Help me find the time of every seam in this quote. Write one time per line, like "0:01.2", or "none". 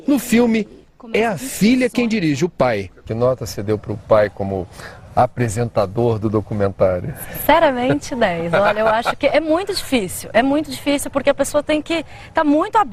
none